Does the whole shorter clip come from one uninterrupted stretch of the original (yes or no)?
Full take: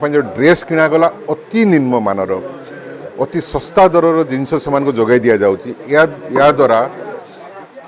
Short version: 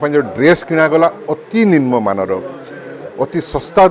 yes